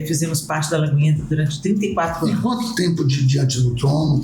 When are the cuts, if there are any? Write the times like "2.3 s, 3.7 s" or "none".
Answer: none